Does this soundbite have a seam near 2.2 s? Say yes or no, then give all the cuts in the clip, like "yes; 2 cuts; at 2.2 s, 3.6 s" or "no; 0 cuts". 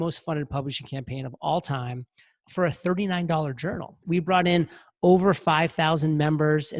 no; 1 cut; at 3.9 s